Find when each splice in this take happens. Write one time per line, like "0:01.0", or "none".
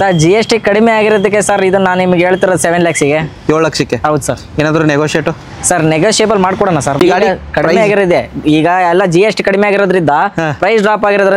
0:07.0